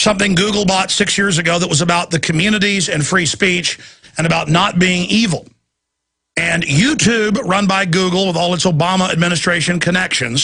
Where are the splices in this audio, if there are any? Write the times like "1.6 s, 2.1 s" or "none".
none